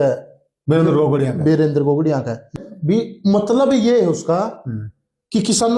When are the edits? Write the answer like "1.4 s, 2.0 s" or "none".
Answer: 2.5 s